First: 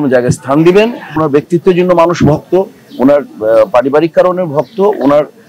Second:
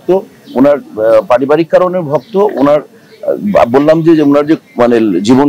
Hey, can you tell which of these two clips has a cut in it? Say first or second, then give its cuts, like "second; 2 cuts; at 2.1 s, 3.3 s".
first; 1 cut; at 1.1 s